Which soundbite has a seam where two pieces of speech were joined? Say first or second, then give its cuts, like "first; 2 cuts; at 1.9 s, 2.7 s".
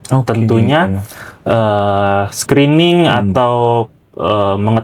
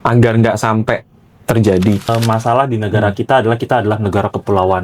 second; 1 cut; at 2.1 s